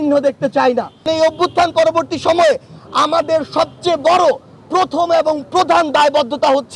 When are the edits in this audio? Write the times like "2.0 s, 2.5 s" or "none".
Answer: 1.1 s